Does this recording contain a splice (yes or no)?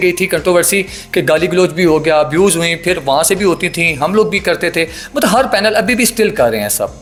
no